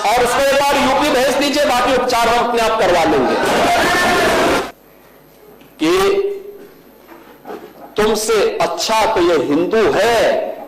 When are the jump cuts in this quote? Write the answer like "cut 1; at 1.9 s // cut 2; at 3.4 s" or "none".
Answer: cut 1; at 4.6 s